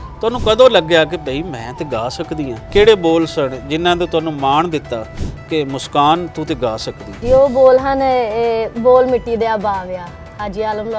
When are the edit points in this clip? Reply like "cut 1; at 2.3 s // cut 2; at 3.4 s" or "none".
cut 1; at 2.7 s // cut 2; at 7.2 s